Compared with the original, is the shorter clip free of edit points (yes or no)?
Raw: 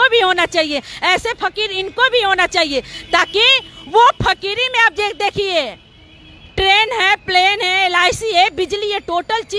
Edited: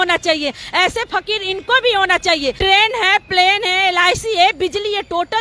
no